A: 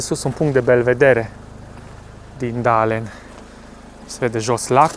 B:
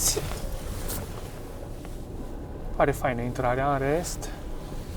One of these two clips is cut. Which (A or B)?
B